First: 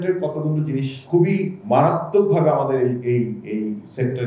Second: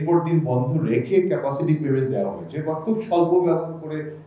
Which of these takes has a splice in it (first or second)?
first